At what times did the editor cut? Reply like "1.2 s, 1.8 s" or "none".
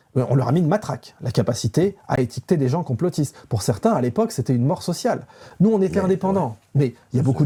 none